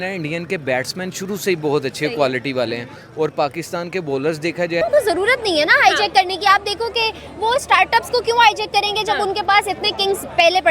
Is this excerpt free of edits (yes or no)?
no